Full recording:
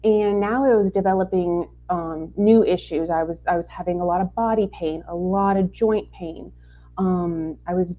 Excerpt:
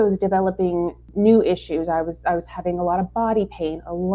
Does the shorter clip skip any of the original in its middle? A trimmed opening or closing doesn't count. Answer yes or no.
yes